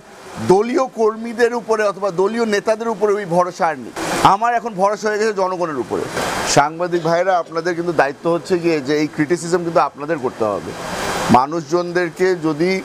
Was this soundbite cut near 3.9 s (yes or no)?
yes